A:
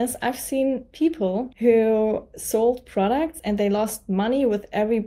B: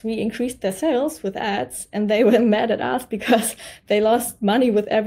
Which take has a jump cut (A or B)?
A